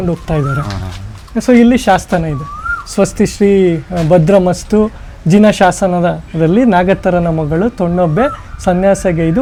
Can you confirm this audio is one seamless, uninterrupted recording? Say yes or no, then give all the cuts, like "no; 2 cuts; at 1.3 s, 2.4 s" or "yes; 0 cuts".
yes; 0 cuts